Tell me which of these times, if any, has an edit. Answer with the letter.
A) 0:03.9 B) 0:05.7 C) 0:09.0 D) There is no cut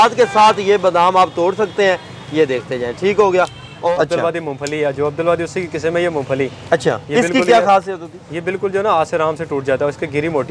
A